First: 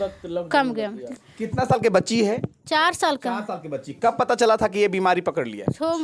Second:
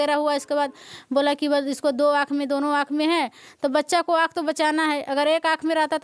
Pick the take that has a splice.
first; 1 cut; at 1.0 s

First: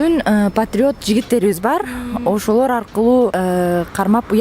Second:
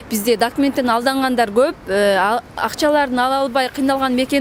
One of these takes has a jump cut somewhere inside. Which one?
first; 1 cut; at 3.4 s

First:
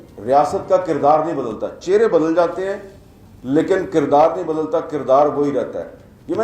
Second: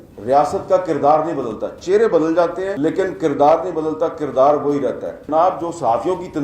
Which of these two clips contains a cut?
second; 2 cuts; at 2.7 s, 5.2 s

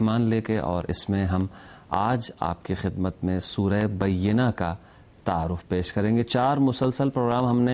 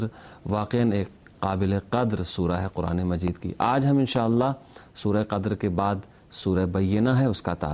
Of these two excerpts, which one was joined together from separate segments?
second; 1 cut; at 3.7 s

